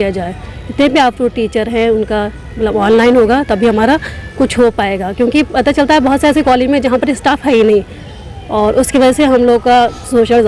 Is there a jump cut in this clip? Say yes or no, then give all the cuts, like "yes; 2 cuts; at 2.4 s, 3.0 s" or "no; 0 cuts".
no; 0 cuts